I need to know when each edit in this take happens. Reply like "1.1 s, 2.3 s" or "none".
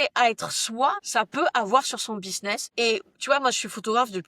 2.6 s